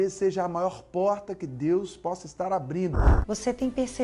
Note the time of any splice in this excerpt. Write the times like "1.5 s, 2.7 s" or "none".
3.1 s